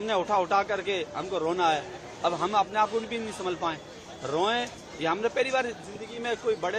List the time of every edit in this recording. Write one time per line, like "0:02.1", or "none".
none